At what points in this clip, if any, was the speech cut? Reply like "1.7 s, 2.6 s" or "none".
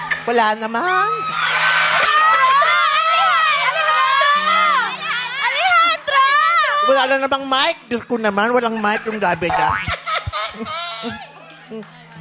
2.6 s, 3.8 s, 5.0 s